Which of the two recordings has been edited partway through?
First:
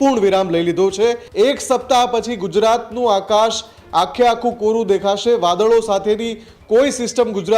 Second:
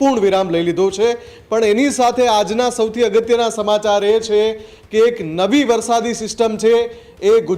first; 1 cut; at 1.2 s

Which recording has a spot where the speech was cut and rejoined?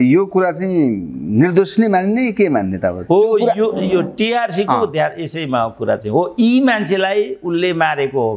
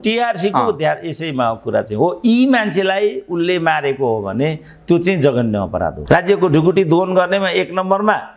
second; 1 cut; at 6.0 s

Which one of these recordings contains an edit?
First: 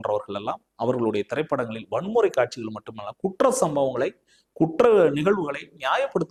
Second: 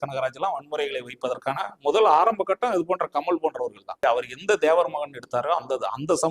second; 1 cut; at 4.0 s

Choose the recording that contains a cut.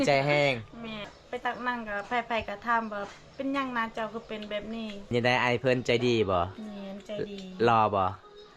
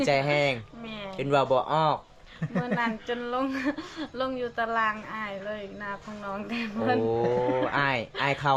first; 2 cuts; at 1.1 s, 5.1 s

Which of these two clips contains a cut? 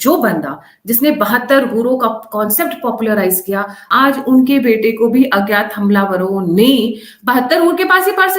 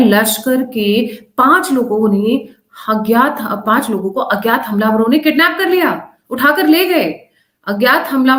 first; 1 cut; at 3.8 s

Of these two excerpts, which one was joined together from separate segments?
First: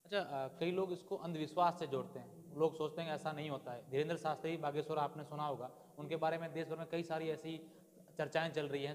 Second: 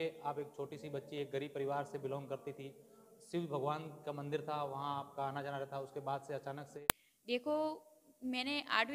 second; 1 cut; at 6.7 s

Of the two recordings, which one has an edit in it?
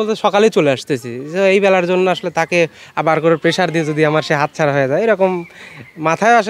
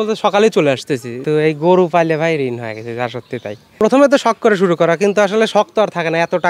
second; 2 cuts; at 1.2 s, 3.8 s

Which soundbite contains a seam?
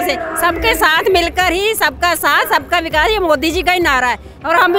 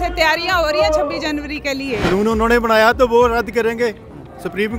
second; 1 cut; at 2.0 s

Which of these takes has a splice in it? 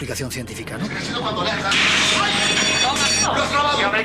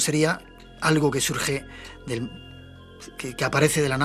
first; 1 cut; at 1.0 s

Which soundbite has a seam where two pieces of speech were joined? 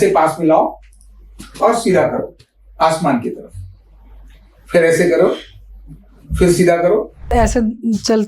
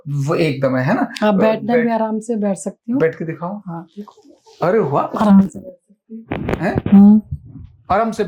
first; 1 cut; at 7.3 s

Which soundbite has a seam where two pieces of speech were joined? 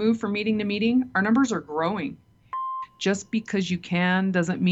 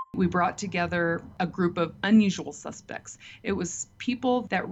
first; 1 cut; at 2.5 s

